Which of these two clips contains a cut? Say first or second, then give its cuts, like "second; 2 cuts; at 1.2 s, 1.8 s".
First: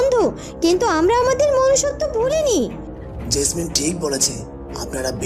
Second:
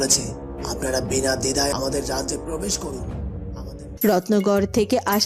second; 1 cut; at 3.5 s